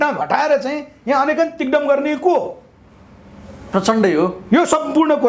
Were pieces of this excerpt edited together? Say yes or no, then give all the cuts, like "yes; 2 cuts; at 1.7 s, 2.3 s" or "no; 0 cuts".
no; 0 cuts